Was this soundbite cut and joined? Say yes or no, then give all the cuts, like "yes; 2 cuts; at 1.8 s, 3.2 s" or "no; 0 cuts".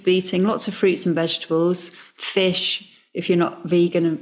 no; 0 cuts